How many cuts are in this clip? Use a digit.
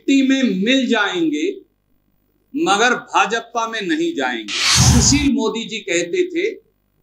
1